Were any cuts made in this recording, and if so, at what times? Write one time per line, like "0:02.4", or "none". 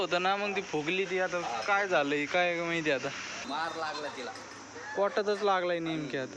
0:03.4